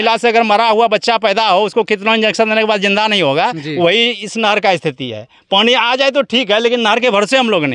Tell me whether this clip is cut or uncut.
uncut